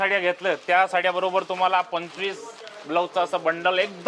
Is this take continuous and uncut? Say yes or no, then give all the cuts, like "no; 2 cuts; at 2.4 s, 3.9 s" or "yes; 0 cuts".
yes; 0 cuts